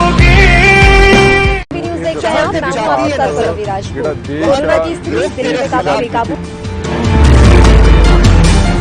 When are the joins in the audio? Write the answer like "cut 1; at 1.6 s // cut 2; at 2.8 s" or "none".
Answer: cut 1; at 2.1 s